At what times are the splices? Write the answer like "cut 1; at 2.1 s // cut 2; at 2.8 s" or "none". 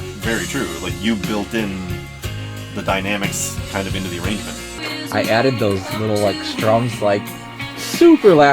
cut 1; at 4.8 s